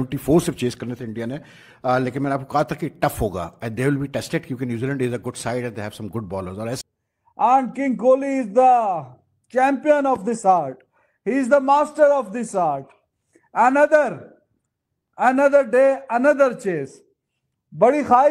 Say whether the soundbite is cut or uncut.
cut